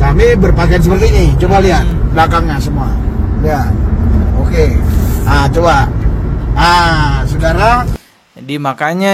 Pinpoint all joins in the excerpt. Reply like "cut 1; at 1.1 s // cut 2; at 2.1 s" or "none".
none